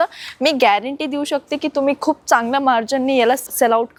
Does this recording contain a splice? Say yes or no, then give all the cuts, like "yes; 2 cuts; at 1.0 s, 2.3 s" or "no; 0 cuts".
no; 0 cuts